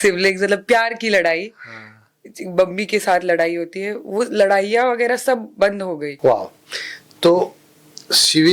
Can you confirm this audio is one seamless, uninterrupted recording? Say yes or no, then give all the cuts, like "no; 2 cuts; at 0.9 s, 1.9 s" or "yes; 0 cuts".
no; 1 cut; at 6.1 s